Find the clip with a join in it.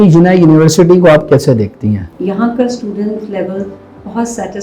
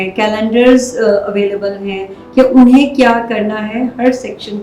first; 1 cut; at 2.0 s

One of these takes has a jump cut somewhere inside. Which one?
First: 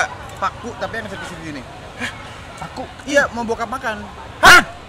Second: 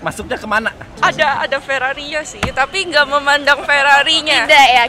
second; 1 cut; at 0.9 s

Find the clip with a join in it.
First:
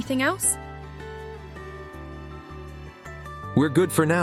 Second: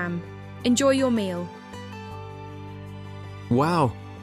second; 2 cuts; at 2.0 s, 3.5 s

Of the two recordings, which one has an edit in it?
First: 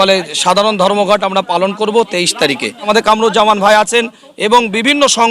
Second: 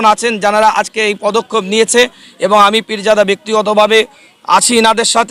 first; 1 cut; at 2.9 s

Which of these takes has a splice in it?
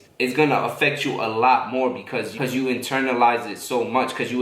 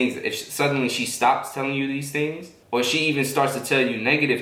first; 1 cut; at 2.3 s

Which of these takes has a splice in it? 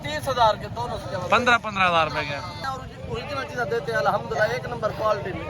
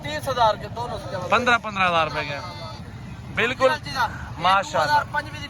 first; 1 cut; at 2.6 s

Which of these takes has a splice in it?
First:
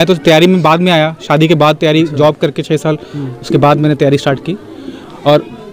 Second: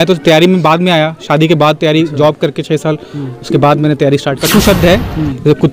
second; 1 cut; at 4.4 s

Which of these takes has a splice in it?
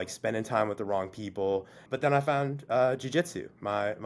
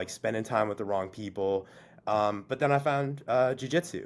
first; 1 cut; at 1.9 s

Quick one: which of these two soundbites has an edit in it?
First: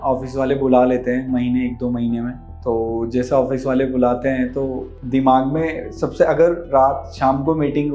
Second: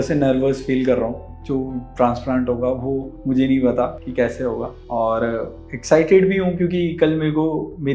second; 1 cut; at 1.3 s

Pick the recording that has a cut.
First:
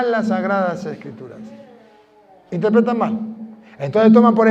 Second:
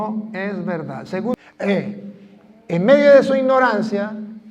second; 1 cut; at 1.3 s

